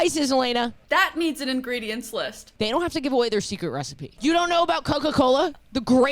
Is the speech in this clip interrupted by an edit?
yes; 3 cuts; at 0.8 s, 2.4 s, 4.1 s

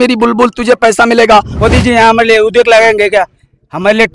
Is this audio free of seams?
no; 1 cut; at 1.5 s

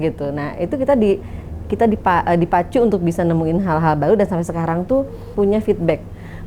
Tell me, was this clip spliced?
yes; 1 cut; at 5.3 s

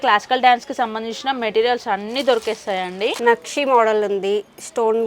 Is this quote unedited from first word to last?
no; 1 cut; at 3.2 s

